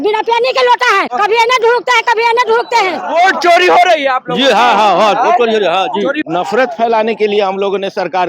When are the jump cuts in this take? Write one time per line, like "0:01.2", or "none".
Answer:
0:01.1
0:03.0
0:06.2